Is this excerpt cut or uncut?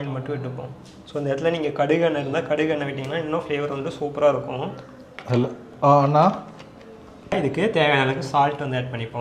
uncut